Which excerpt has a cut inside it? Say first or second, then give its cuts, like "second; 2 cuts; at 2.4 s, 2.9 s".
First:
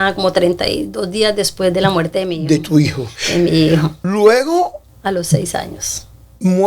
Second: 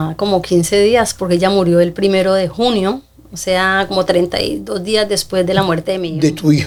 first; 2 cuts; at 4.0 s, 4.9 s